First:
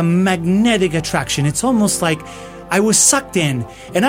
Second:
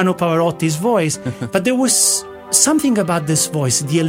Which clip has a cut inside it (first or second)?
second